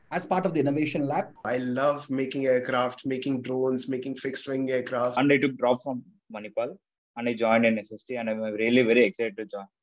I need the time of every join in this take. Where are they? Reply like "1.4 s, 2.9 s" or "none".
1.5 s, 5.2 s